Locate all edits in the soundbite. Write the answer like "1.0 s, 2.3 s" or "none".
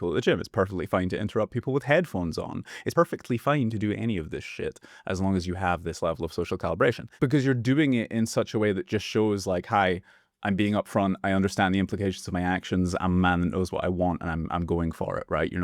2.9 s, 7.1 s